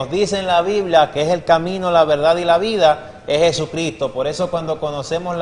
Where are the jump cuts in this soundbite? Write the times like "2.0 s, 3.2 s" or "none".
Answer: 2.2 s